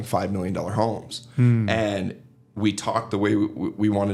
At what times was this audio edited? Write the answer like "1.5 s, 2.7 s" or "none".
none